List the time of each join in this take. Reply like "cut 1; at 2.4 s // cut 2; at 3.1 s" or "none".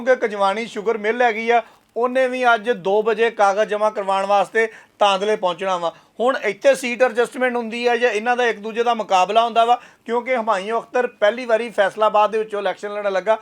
none